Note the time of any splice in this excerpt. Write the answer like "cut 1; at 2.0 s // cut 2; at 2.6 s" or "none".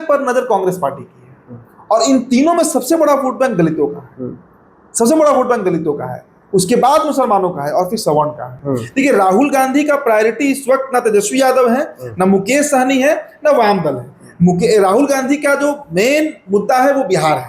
cut 1; at 8.5 s